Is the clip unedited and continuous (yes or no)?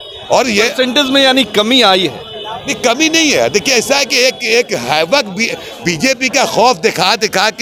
yes